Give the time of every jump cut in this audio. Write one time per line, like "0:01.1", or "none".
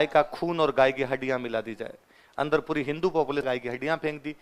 0:03.4